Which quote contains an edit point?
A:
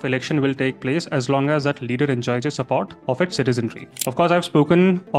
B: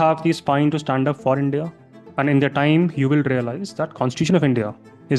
A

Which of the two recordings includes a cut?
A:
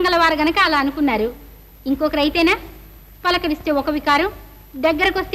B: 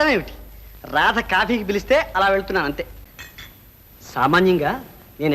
B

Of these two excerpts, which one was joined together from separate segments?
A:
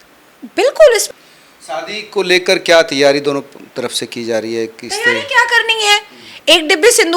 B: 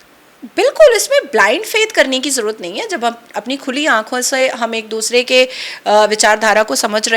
A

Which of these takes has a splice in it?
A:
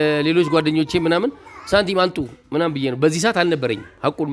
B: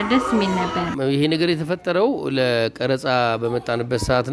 B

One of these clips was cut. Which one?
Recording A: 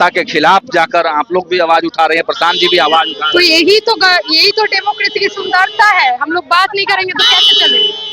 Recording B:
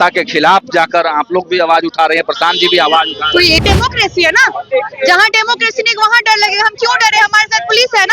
B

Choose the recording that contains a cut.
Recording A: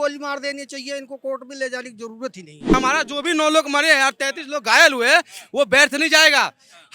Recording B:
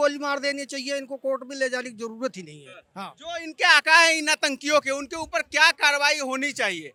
A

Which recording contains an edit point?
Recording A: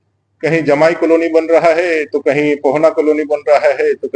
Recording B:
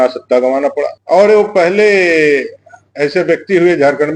B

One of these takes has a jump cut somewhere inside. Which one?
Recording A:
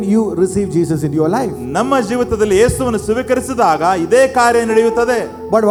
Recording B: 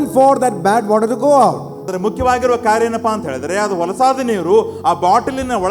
B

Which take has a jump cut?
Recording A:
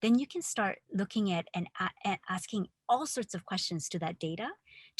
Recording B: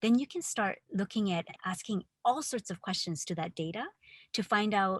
B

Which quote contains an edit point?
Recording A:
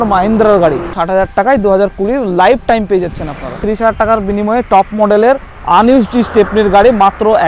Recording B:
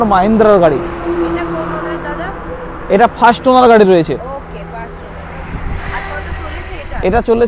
A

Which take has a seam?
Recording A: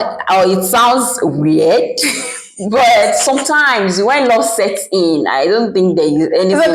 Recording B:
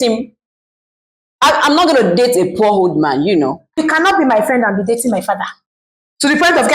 B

